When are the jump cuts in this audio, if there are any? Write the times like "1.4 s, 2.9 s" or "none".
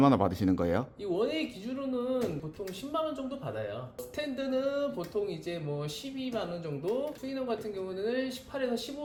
none